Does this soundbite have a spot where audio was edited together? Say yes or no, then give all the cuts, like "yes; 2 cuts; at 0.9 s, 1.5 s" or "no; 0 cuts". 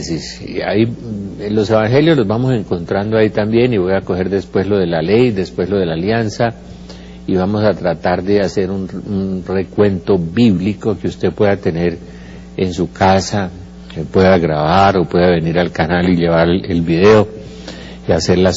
yes; 1 cut; at 12.2 s